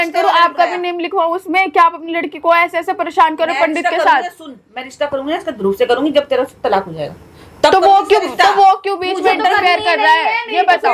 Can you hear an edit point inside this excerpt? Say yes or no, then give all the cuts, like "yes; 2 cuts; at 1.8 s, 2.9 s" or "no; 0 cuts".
no; 0 cuts